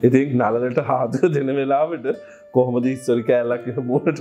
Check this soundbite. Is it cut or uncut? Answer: uncut